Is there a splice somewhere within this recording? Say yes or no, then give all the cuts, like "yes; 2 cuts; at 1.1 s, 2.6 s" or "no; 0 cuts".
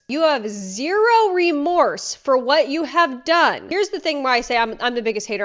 yes; 1 cut; at 3.6 s